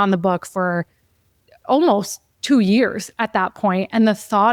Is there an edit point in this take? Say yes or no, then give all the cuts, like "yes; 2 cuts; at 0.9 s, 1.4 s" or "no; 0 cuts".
no; 0 cuts